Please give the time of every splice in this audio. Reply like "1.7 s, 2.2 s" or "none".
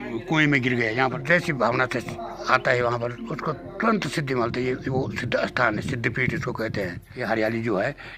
1.2 s, 7.0 s